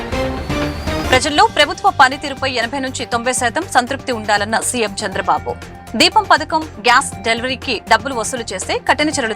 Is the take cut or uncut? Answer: cut